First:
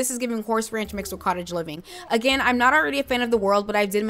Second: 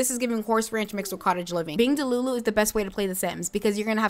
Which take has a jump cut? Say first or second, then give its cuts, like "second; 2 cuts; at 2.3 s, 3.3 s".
second; 1 cut; at 1.7 s